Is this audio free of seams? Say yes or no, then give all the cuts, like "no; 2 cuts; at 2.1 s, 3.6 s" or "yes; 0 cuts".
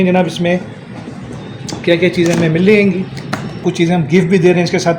no; 1 cut; at 3.6 s